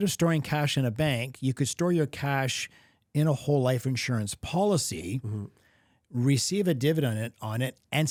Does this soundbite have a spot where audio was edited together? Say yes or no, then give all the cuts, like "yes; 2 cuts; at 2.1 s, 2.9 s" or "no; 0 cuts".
no; 0 cuts